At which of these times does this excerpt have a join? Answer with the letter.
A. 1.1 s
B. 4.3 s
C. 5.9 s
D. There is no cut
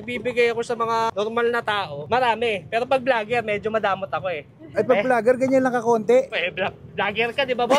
A